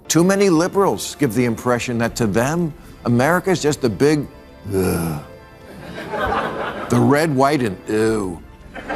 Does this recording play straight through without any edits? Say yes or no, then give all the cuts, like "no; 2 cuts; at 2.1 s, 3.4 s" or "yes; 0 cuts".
yes; 0 cuts